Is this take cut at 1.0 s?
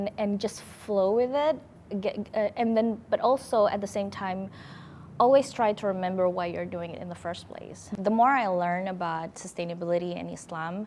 no; 1 cut; at 7.9 s

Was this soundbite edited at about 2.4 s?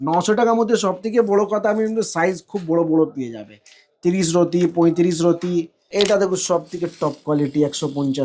no; 1 cut; at 5.8 s

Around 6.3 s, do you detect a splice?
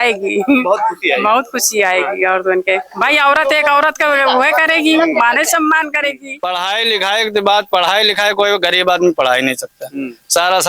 yes; 1 cut; at 6.3 s

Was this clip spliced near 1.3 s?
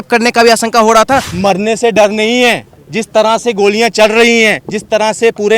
yes; 1 cut; at 1.3 s

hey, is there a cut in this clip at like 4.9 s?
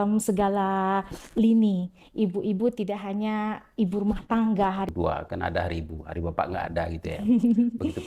yes; 1 cut; at 4.9 s

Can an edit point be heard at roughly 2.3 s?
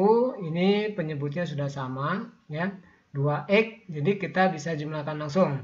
no; 0 cuts

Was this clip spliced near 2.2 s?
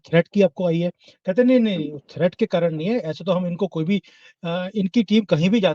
no; 0 cuts

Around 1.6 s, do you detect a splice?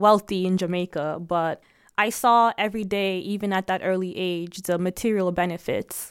yes; 1 cut; at 1.6 s

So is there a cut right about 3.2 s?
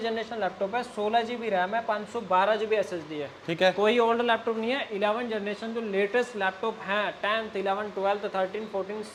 no; 0 cuts

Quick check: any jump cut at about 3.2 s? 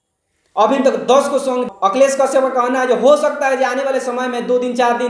no; 1 cut; at 1.7 s

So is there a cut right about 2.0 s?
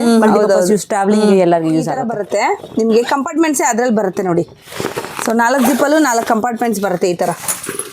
yes; 1 cut; at 2.0 s

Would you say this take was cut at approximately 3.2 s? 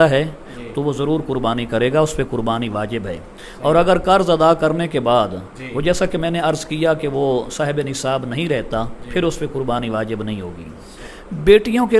no; 1 cut; at 10.6 s

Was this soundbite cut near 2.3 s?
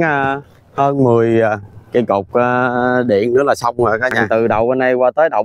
no; 1 cut; at 4.2 s

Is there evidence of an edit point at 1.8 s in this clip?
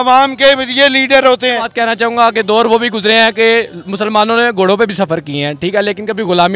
yes; 1 cut; at 1.8 s

